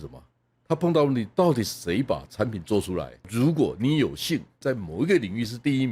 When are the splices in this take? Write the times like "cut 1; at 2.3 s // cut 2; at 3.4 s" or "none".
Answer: cut 1; at 3.2 s // cut 2; at 4.6 s